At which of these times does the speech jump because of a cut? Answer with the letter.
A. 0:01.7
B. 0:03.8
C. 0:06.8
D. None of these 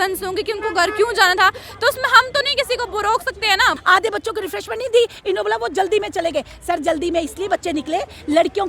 B